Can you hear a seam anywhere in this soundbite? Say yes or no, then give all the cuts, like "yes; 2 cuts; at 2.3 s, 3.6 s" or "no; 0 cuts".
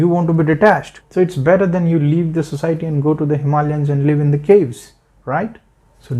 yes; 1 cut; at 1.0 s